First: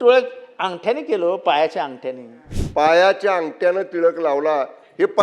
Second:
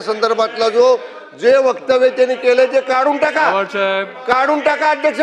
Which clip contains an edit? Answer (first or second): first